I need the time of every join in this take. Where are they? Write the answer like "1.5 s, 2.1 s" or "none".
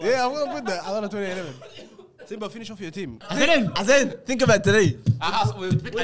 3.3 s